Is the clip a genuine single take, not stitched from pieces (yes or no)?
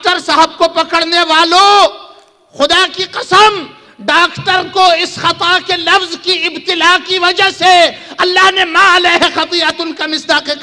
yes